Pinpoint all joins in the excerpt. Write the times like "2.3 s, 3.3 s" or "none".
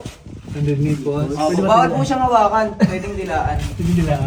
none